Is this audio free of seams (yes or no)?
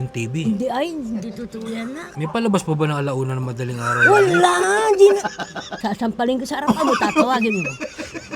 no